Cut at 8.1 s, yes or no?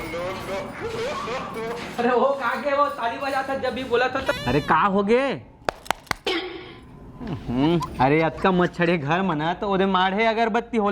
no